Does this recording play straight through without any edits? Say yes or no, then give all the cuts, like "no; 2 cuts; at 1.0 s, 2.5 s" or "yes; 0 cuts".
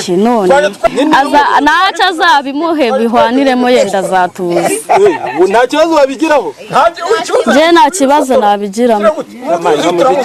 yes; 0 cuts